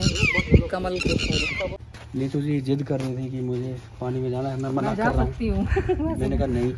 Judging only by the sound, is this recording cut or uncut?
cut